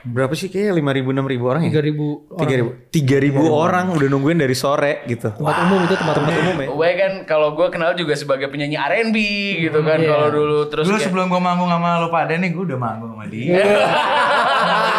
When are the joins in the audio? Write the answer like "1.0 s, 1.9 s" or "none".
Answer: 6.6 s